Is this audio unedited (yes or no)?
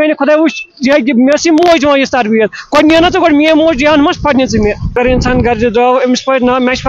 no